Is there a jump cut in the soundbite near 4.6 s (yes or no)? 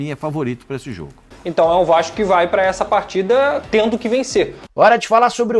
yes